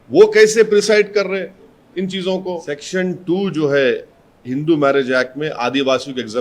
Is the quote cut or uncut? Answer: cut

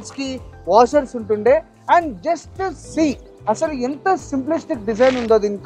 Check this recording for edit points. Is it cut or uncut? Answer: uncut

